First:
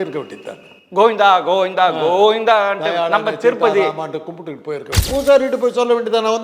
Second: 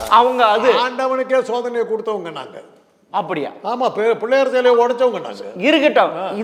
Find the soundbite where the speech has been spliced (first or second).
first